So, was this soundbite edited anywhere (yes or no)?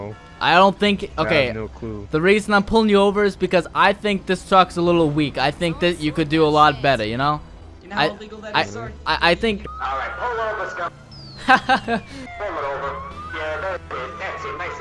yes